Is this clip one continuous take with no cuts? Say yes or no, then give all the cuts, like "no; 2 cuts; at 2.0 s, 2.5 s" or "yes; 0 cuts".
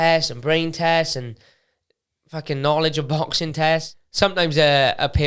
no; 1 cut; at 4.0 s